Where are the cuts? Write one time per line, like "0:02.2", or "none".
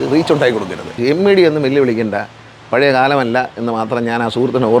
0:00.9